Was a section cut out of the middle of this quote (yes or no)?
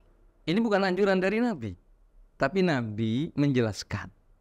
no